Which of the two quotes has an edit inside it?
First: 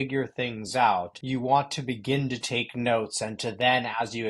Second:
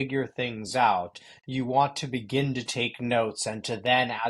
first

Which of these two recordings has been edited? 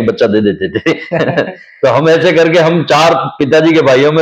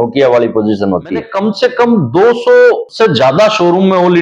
second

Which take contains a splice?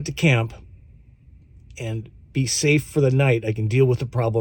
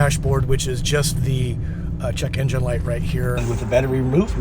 second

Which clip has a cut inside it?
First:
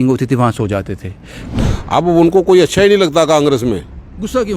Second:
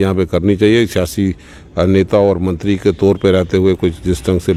first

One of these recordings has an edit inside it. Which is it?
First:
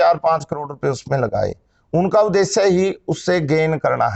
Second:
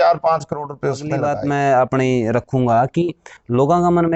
second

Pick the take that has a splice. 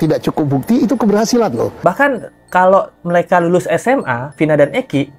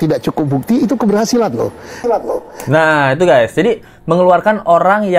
first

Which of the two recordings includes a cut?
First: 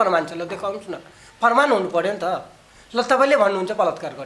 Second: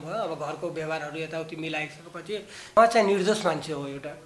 second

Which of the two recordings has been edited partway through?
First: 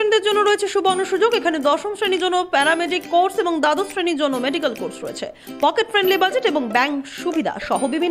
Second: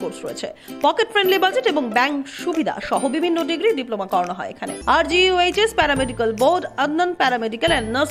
second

